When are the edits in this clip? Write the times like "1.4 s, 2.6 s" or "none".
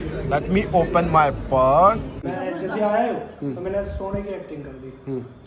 2.1 s